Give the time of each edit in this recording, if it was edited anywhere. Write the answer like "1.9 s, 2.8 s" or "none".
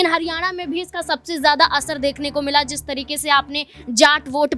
none